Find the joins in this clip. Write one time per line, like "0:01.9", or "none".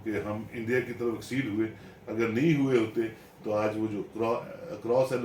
none